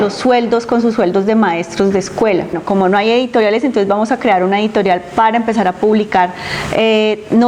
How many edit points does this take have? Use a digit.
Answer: 1